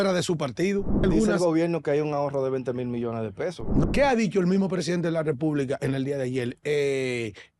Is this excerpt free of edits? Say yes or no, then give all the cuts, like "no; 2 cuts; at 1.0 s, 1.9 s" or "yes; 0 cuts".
no; 2 cuts; at 1.0 s, 3.8 s